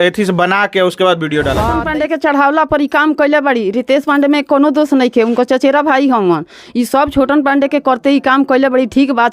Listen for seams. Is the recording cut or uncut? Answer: cut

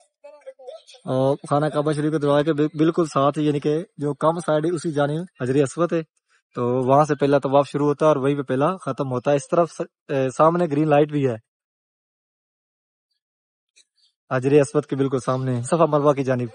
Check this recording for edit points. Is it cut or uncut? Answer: cut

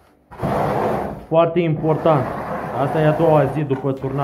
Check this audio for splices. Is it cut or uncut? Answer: uncut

